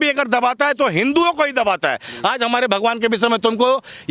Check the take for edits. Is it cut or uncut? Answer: uncut